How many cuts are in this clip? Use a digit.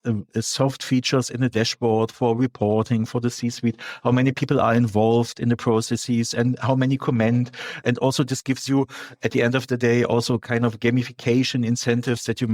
0